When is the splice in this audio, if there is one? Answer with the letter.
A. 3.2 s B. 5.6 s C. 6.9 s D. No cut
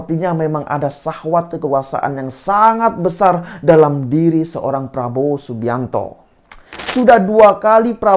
C